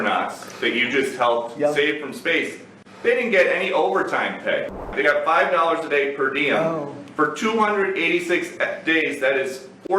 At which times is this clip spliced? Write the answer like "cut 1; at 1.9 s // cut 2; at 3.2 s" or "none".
cut 1; at 4.9 s